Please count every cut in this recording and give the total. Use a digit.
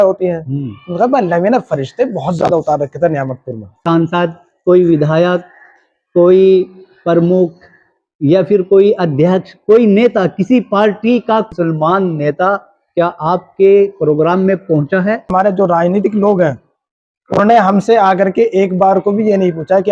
3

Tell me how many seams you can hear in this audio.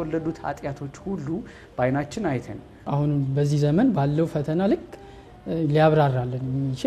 1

